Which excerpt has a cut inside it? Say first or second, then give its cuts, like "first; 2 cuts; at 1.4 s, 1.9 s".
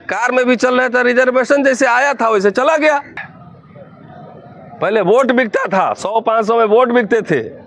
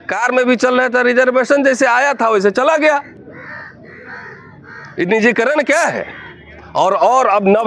first; 1 cut; at 3.2 s